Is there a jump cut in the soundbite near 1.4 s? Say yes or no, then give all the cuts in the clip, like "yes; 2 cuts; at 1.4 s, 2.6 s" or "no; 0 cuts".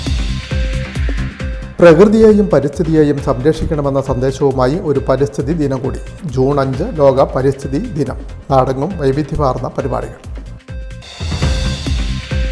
yes; 1 cut; at 1.4 s